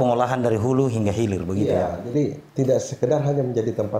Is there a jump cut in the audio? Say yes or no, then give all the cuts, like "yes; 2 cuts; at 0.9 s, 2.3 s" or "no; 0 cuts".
no; 0 cuts